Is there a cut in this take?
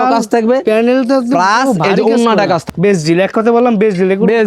yes; 1 cut; at 2.6 s

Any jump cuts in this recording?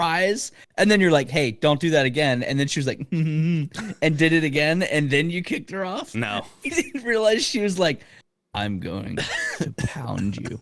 no; 0 cuts

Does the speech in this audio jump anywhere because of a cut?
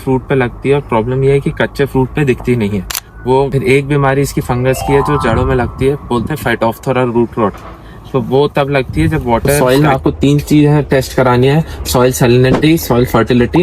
yes; 2 cuts; at 3.5 s, 9.6 s

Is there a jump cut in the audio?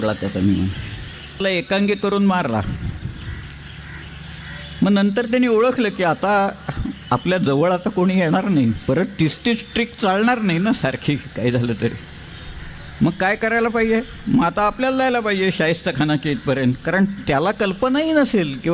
yes; 1 cut; at 1.4 s

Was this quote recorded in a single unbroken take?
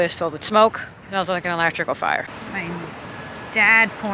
no; 2 cuts; at 0.9 s, 2.3 s

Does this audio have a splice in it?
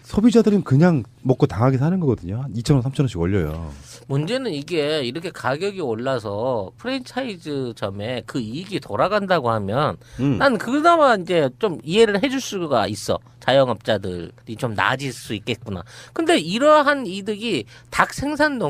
yes; 1 cut; at 15.0 s

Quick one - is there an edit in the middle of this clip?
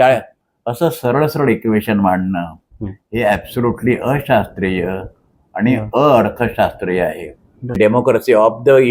yes; 1 cut; at 7.8 s

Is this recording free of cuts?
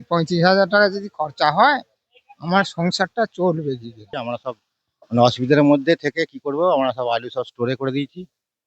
no; 1 cut; at 4.2 s

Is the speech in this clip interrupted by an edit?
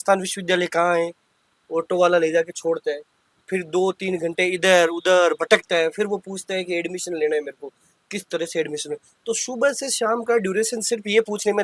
no; 0 cuts

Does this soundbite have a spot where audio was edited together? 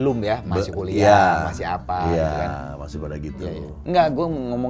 no; 0 cuts

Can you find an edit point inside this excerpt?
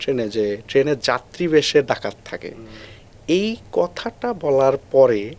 no; 0 cuts

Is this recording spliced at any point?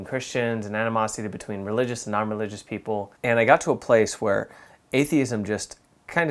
yes; 1 cut; at 3.1 s

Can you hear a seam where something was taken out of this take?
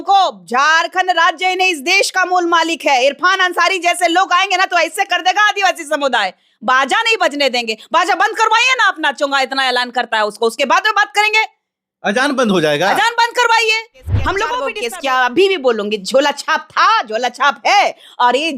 yes; 1 cut; at 14.7 s

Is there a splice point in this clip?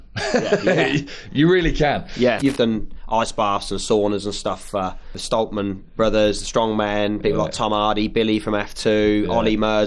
yes; 2 cuts; at 2.4 s, 5.2 s

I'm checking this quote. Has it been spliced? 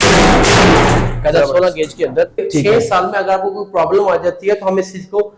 yes; 1 cut; at 2.4 s

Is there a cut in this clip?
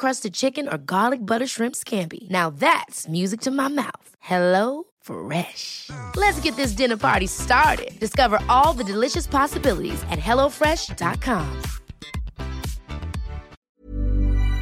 yes; 1 cut; at 13.6 s

